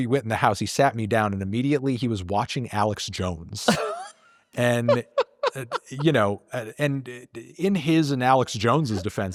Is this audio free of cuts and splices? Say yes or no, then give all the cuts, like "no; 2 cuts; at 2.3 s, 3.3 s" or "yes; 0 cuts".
yes; 0 cuts